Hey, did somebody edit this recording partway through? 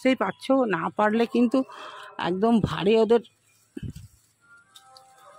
no; 0 cuts

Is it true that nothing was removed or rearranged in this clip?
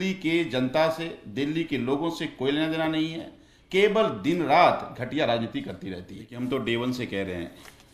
no; 1 cut; at 6.2 s

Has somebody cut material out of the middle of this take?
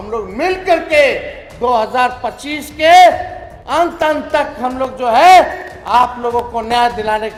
no; 0 cuts

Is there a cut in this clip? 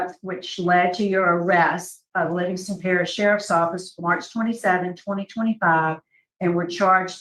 no; 0 cuts

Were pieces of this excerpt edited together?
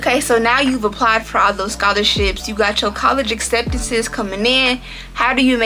no; 0 cuts

